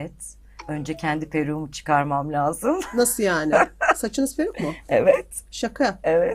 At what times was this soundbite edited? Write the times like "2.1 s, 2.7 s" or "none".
none